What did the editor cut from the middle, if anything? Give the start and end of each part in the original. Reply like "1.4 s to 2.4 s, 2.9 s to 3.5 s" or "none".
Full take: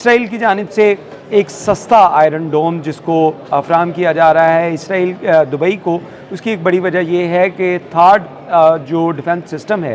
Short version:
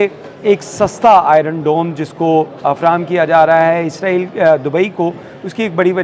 none